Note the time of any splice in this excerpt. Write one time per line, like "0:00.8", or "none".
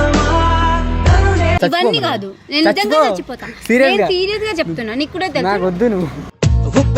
0:01.6